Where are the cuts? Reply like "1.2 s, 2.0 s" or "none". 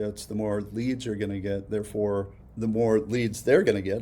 2.4 s

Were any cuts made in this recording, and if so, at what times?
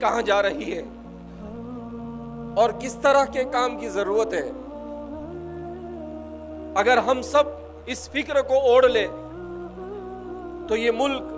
0.8 s, 2.2 s, 4.5 s, 6.7 s

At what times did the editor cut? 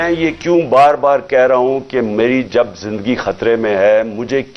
none

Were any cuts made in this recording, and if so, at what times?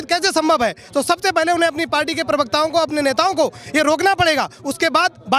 none

